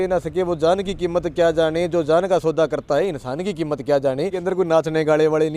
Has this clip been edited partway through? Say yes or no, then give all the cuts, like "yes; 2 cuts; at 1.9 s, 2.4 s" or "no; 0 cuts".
yes; 1 cut; at 4.4 s